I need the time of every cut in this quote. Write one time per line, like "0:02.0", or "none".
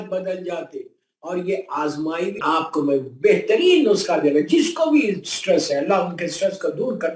0:02.4